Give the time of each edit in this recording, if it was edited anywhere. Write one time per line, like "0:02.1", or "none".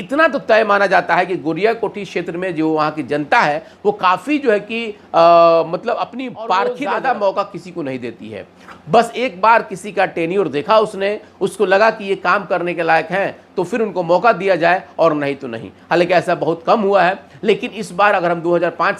0:06.8